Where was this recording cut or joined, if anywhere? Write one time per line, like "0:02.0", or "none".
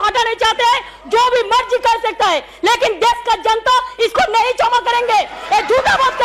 none

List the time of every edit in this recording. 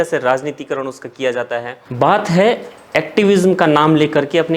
0:01.8

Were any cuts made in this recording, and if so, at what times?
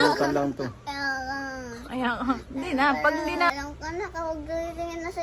0:03.5

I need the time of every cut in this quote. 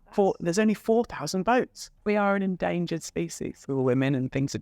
0:01.8
0:03.5

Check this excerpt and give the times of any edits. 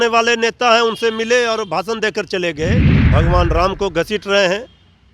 0:02.9

